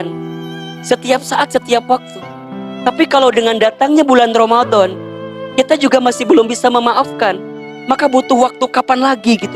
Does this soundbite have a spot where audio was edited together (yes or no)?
no